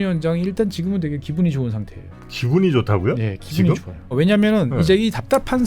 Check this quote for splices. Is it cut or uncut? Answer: cut